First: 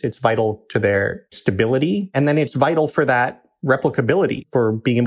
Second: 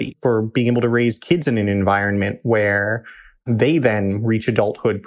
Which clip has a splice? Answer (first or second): first